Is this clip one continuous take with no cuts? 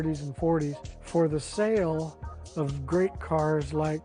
yes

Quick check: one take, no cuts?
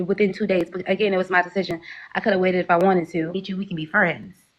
no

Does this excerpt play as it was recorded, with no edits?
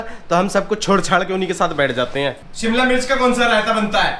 no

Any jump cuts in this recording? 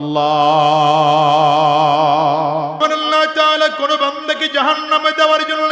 yes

